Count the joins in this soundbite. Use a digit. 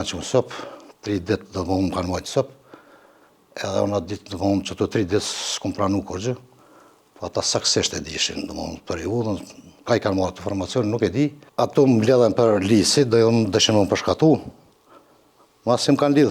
1